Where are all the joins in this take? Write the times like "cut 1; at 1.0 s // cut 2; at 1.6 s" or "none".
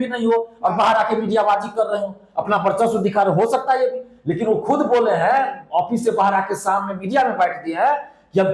none